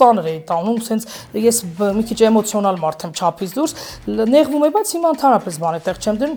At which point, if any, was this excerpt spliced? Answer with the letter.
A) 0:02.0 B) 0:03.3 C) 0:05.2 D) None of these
D